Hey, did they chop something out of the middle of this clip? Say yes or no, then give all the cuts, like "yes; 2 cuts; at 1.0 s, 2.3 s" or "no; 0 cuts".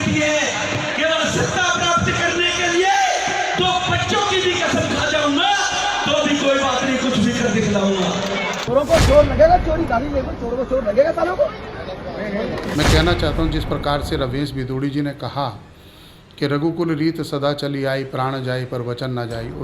yes; 2 cuts; at 8.6 s, 12.8 s